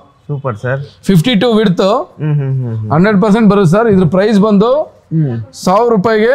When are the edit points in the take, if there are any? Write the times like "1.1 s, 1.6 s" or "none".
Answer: none

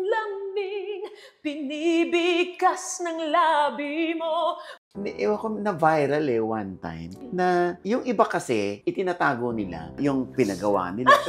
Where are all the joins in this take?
4.7 s, 9.9 s

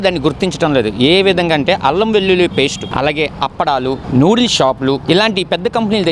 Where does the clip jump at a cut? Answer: 2.9 s, 4.0 s

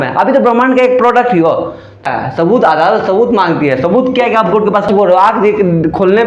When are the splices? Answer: 2.0 s, 4.9 s

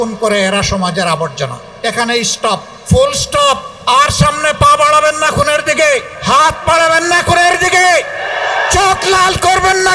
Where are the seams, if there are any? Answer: 1.7 s, 2.7 s, 3.7 s, 6.1 s

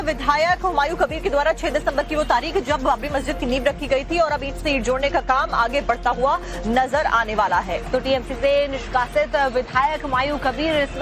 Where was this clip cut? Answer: 0.9 s

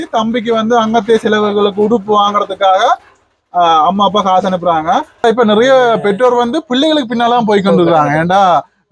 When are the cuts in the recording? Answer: 5.2 s

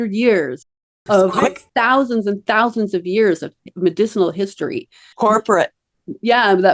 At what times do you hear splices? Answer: 5.0 s

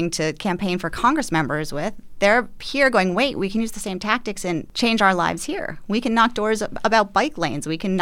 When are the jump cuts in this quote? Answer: 4.7 s

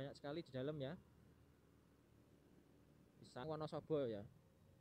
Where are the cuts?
3.4 s

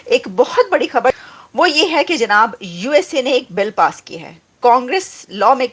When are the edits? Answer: 1.2 s

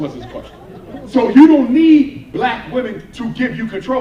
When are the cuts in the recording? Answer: 1.2 s

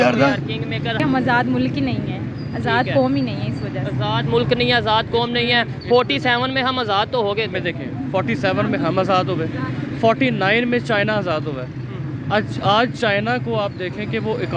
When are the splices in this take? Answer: 1.0 s

